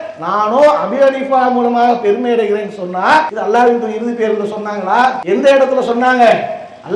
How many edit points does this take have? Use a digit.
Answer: 2